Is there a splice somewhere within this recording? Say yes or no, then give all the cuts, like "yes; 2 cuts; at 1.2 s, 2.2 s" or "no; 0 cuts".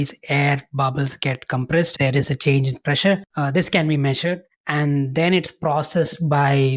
yes; 3 cuts; at 1.9 s, 3.3 s, 4.5 s